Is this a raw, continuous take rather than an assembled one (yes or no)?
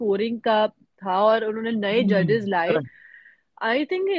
yes